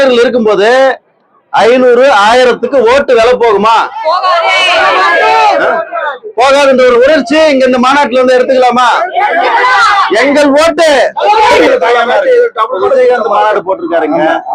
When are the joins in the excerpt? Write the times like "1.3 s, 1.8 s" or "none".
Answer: 11.6 s